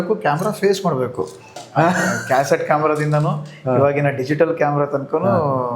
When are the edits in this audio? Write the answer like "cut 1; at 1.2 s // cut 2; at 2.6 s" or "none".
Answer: cut 1; at 1.6 s